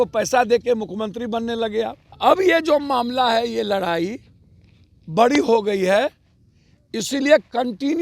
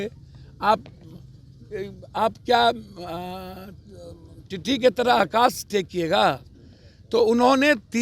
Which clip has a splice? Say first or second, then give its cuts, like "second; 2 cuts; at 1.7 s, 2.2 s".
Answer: first; 1 cut; at 2.1 s